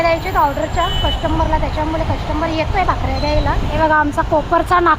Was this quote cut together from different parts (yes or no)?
yes